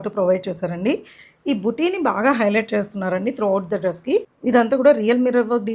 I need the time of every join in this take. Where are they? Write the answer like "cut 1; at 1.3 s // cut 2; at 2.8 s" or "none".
cut 1; at 1.2 s // cut 2; at 4.3 s